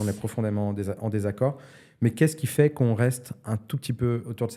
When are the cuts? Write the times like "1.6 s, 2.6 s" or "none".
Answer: none